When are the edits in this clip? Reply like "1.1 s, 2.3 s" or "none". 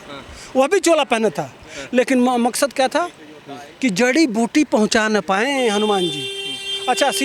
none